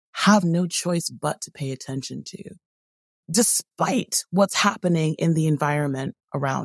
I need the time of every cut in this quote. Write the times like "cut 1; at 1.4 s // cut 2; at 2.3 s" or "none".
cut 1; at 3.2 s